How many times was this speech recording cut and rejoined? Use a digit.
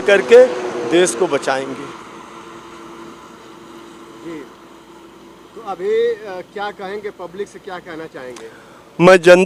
0